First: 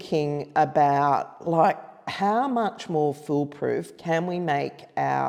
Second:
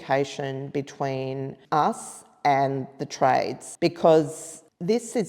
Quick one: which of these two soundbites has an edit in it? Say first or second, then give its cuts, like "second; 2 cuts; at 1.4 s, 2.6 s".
second; 2 cuts; at 1.6 s, 3.6 s